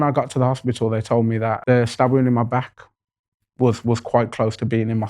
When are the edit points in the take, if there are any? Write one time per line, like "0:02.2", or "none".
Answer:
0:01.6